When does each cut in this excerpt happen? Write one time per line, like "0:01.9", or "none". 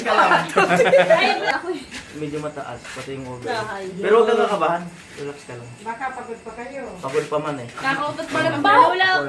0:01.5

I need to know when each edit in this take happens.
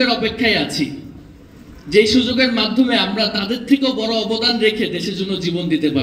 none

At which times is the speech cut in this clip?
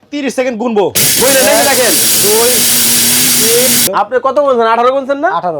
0:03.9

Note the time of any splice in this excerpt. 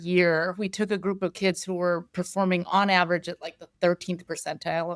none

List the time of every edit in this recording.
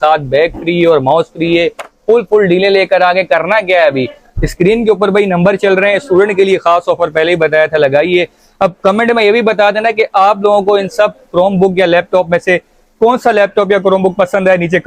none

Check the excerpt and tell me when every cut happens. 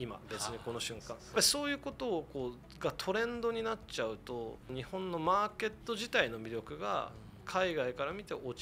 0:01.3
0:04.7

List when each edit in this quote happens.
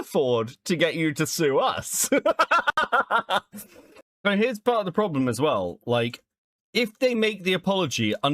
0:04.1

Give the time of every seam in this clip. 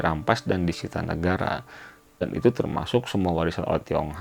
0:02.2

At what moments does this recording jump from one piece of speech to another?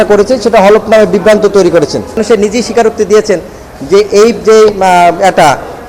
0:02.2

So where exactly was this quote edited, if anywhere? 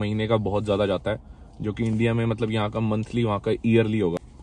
none

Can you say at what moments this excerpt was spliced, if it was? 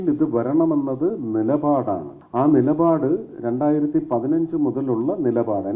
0:02.2

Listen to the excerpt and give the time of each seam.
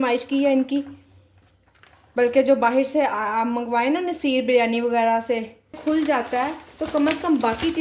0:05.8

